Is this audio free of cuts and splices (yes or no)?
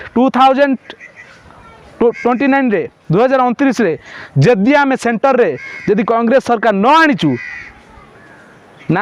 yes